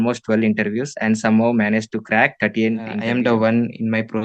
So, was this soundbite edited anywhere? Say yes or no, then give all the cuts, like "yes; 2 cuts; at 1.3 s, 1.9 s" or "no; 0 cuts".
yes; 1 cut; at 3.0 s